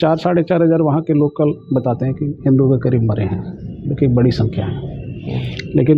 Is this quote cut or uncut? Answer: uncut